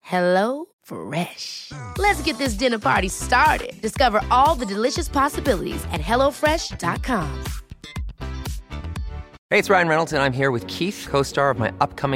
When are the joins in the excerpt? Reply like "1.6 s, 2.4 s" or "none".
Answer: 9.3 s